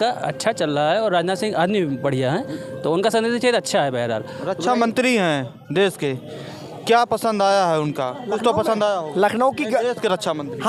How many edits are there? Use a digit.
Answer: 0